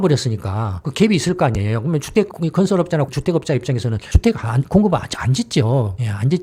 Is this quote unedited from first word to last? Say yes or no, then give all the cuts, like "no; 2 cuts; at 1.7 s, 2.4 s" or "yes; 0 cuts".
yes; 0 cuts